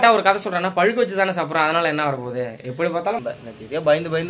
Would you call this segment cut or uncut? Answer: cut